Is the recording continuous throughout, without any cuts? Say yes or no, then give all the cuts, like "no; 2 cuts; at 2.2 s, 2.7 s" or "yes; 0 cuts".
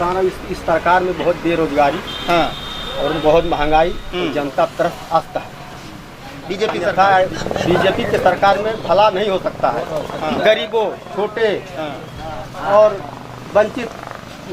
no; 1 cut; at 6.9 s